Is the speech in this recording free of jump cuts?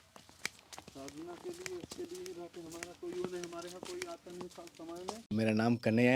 yes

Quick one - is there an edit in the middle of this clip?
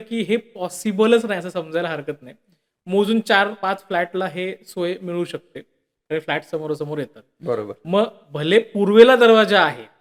no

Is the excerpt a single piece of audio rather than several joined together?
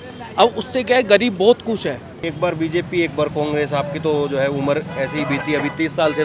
no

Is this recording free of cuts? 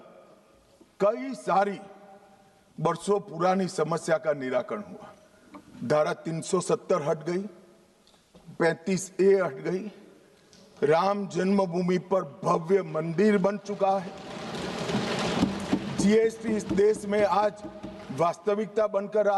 yes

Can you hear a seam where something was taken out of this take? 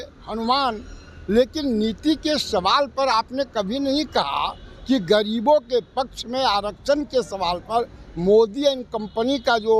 no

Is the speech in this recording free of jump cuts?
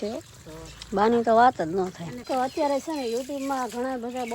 no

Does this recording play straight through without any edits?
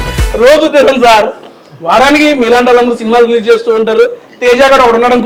yes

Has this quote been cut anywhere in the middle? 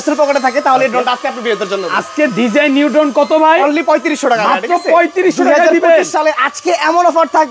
no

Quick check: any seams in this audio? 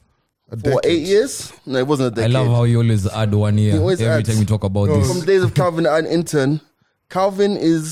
no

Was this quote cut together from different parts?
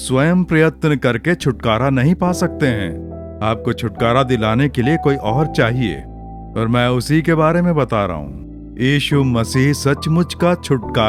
no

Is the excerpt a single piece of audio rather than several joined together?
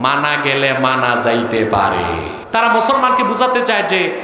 no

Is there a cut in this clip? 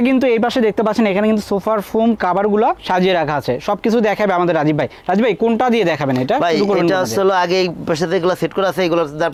no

